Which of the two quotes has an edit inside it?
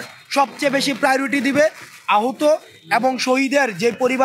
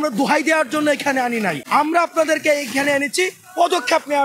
second; 1 cut; at 1.6 s

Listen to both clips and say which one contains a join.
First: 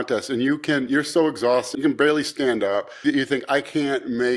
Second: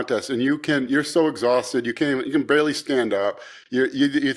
first; 2 cuts; at 1.7 s, 3.0 s

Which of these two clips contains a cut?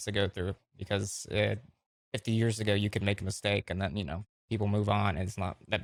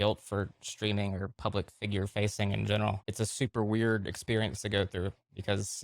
second; 1 cut; at 3.0 s

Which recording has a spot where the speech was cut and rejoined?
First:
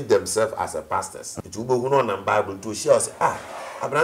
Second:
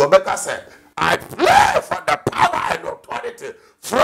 first; 1 cut; at 1.3 s

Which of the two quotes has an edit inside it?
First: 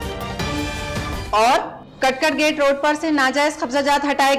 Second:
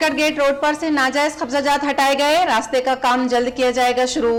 first; 1 cut; at 0.9 s

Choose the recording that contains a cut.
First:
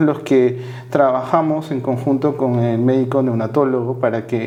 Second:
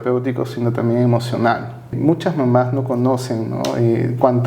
second; 1 cut; at 1.9 s

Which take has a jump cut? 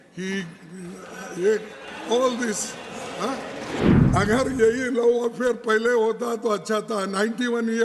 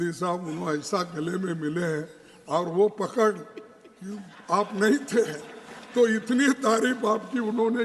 first; 1 cut; at 3.9 s

